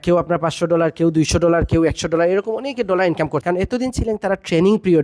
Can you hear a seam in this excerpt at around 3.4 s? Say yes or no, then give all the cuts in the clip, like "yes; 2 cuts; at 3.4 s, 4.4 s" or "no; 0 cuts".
yes; 1 cut; at 3.4 s